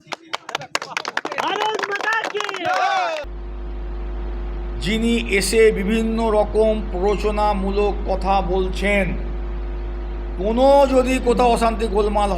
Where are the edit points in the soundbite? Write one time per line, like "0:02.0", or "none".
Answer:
0:03.3